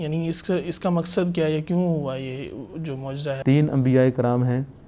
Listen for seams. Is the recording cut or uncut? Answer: cut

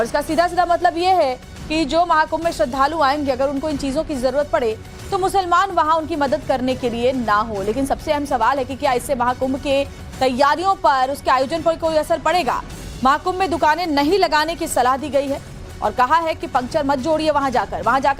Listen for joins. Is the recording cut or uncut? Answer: uncut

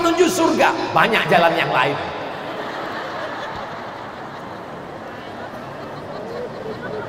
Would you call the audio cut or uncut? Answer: uncut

